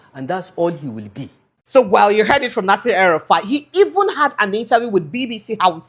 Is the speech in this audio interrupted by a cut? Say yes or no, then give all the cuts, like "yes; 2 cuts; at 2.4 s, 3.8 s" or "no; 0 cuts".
no; 0 cuts